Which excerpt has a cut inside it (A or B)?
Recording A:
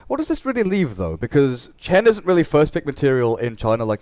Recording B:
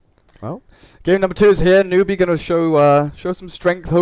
A